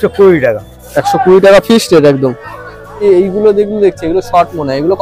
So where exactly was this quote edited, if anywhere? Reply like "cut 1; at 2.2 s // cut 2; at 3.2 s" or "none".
cut 1; at 3.0 s

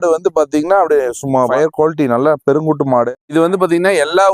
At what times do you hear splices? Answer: cut 1; at 1.5 s // cut 2; at 3.2 s

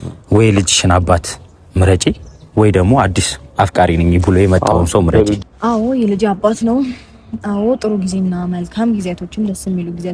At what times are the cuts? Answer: cut 1; at 5.4 s

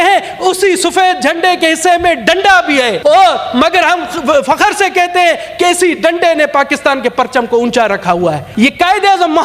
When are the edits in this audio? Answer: cut 1; at 2.9 s // cut 2; at 8.4 s

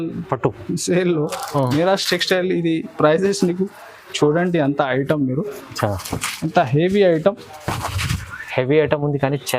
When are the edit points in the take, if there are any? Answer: none

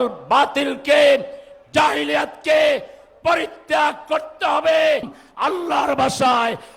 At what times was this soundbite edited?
cut 1; at 5.2 s

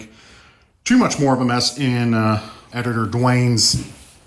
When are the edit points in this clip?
cut 1; at 2.7 s

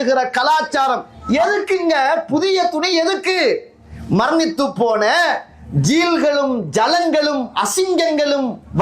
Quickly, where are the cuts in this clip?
cut 1; at 1.1 s

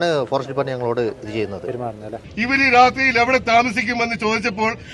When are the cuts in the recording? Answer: cut 1; at 2.2 s

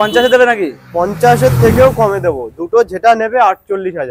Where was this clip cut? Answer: none

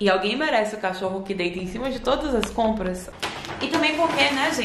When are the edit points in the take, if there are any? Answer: cut 1; at 3.0 s

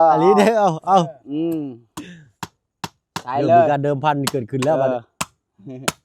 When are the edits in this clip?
none

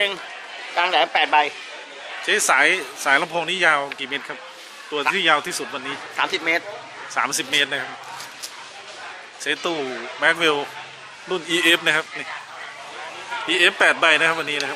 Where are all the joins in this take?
none

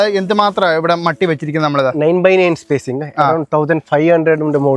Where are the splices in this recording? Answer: none

